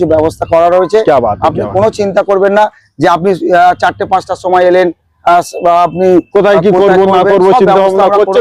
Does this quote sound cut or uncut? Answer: uncut